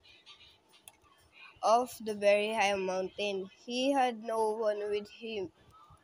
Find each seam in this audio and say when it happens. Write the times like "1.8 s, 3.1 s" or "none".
2.0 s, 3.7 s